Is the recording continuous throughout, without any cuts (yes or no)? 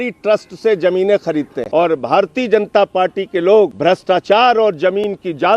no